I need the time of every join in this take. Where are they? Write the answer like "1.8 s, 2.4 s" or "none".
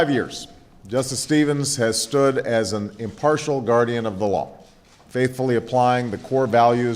1.2 s